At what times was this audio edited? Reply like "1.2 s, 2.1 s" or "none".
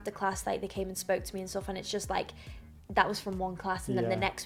none